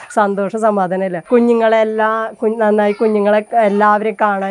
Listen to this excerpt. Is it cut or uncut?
cut